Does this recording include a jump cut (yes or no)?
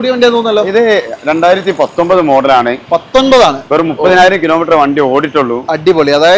no